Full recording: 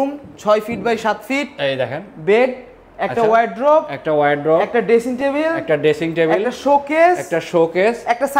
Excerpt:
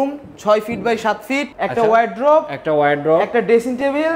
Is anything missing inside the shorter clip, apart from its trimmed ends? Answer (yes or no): yes